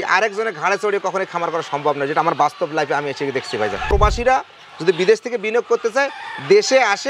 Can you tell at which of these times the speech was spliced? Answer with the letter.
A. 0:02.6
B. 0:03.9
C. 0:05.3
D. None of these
B